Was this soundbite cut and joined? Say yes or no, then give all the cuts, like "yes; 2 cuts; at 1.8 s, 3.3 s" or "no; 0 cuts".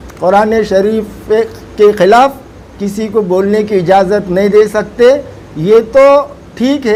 no; 0 cuts